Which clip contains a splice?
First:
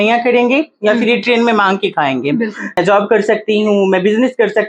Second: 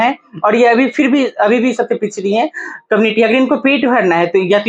first; 1 cut; at 2.8 s

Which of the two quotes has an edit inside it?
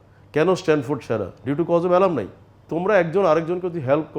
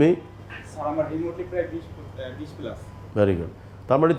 first; 1 cut; at 2.7 s

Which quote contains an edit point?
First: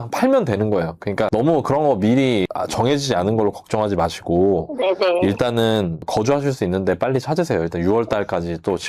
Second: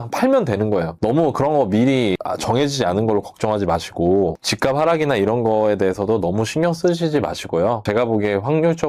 second; 3 cuts; at 1.0 s, 4.4 s, 7.8 s

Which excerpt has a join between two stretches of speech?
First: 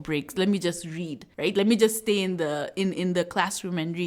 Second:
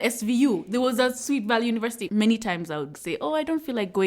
second; 2 cuts; at 2.1 s, 3.0 s

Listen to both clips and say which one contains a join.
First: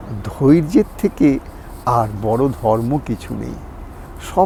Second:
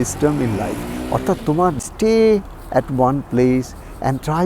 second; 1 cut; at 1.8 s

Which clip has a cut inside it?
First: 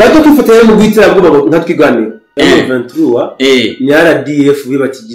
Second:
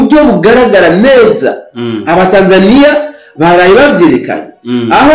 first; 1 cut; at 2.3 s

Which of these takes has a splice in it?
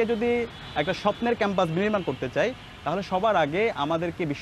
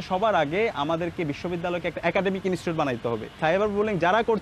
second; 1 cut; at 3.4 s

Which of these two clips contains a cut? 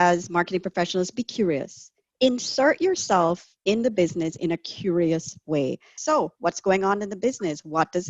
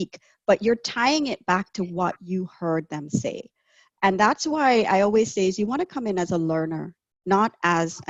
first; 1 cut; at 5.9 s

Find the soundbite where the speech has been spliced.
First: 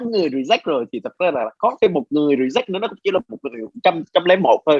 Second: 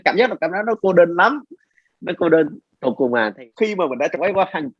second; 1 cut; at 3.4 s

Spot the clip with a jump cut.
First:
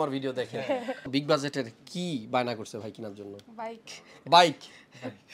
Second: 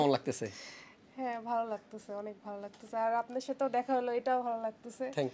first; 1 cut; at 1.0 s

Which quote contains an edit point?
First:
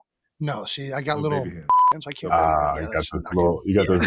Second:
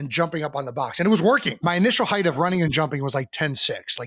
second; 1 cut; at 1.5 s

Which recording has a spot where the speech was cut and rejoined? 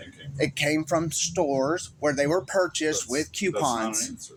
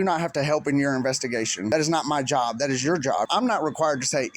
second; 2 cuts; at 1.7 s, 3.3 s

